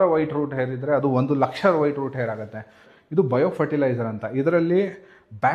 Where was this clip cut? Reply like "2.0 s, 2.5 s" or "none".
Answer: 2.9 s

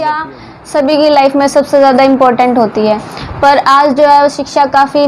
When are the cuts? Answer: none

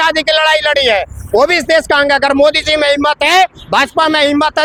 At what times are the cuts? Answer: none

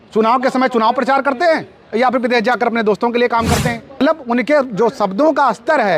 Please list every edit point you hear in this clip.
4.0 s

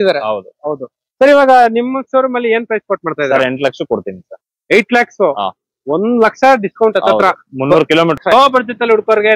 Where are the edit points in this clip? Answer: 8.3 s

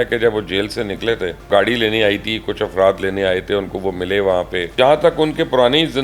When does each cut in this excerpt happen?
1.4 s, 4.7 s

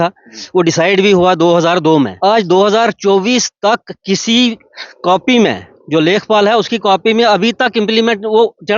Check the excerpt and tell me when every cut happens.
2.1 s

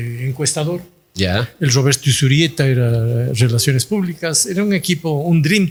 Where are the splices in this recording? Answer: none

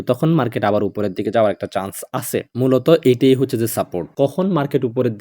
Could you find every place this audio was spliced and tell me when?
4.1 s

